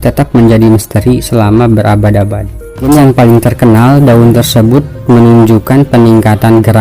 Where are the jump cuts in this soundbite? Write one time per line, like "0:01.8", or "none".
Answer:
0:02.8